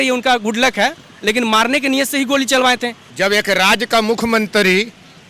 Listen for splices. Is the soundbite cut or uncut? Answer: cut